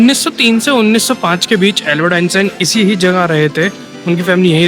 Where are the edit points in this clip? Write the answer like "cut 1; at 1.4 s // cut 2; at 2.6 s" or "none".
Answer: none

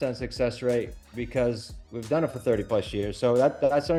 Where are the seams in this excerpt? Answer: none

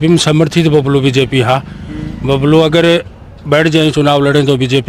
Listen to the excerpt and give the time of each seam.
none

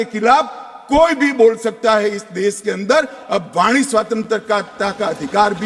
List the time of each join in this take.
none

